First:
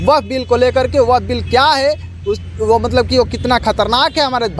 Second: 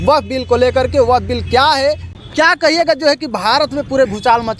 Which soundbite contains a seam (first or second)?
second